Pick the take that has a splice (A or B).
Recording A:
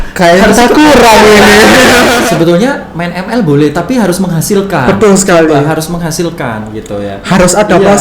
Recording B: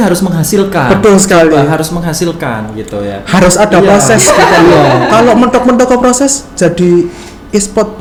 A